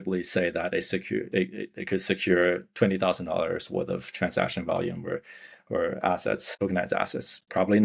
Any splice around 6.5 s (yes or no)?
yes